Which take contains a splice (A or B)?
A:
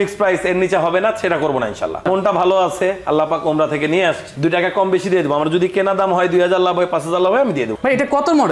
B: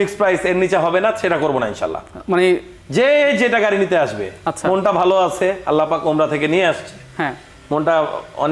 A